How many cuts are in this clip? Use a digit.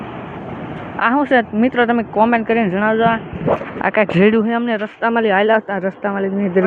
0